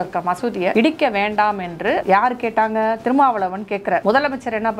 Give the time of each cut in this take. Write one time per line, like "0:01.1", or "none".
0:00.7
0:02.0
0:04.0

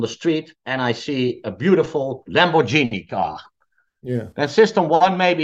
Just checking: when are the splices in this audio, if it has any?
none

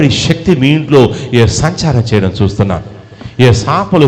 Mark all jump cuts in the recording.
none

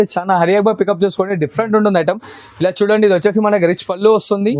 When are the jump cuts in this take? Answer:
none

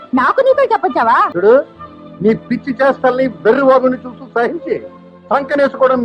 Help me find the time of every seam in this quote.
0:01.3

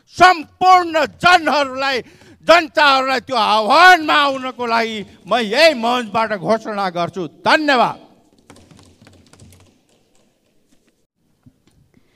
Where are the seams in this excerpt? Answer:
none

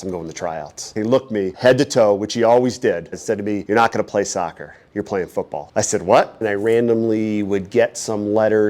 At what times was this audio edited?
0:00.9
0:03.2
0:06.4

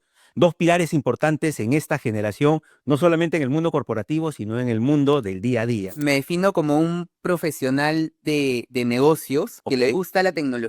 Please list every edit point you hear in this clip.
0:05.9

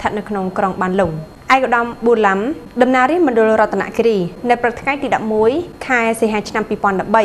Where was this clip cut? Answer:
0:01.3
0:02.6
0:04.3
0:05.8

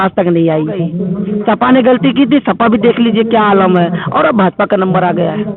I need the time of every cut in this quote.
0:01.0

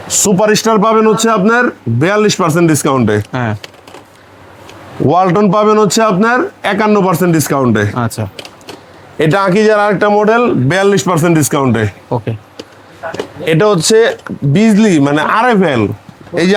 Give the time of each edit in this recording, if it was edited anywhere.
none

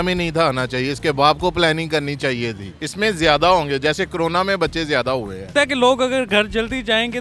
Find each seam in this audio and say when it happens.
0:02.7
0:05.4

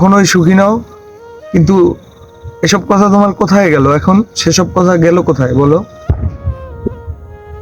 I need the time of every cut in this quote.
none

